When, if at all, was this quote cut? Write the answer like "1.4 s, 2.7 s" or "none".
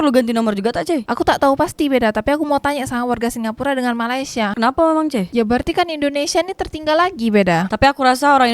4.5 s